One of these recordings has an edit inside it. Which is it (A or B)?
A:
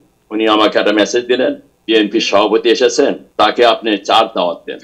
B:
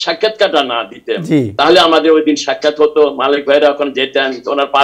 A